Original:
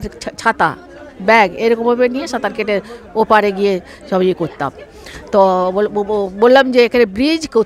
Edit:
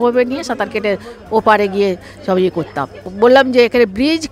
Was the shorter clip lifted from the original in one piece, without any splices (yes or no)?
no